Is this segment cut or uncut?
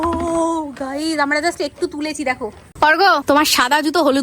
cut